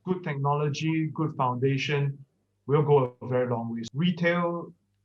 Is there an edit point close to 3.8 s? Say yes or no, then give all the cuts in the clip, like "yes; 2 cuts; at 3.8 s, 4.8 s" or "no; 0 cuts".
yes; 1 cut; at 3.8 s